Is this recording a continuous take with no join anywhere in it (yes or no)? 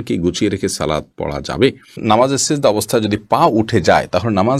no